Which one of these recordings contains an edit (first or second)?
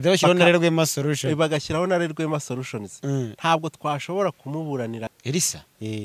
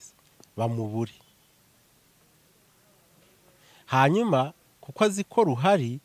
first